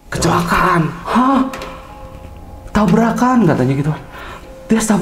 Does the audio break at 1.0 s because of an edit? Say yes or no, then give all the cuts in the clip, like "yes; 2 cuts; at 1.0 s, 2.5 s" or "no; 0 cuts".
yes; 1 cut; at 1.0 s